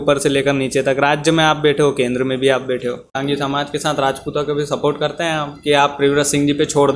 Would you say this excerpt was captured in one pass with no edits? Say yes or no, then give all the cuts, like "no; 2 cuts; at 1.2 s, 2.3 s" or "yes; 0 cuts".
no; 1 cut; at 3.1 s